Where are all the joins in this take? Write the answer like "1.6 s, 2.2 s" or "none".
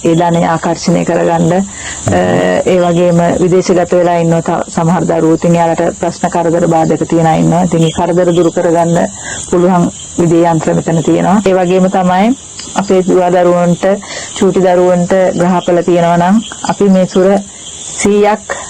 11.4 s